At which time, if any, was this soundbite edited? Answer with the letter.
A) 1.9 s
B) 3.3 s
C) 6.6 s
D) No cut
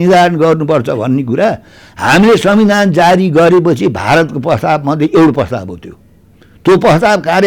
D